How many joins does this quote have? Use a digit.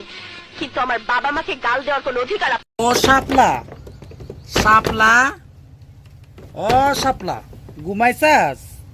1